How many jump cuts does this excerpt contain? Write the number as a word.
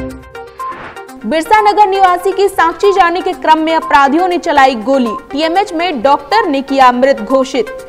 one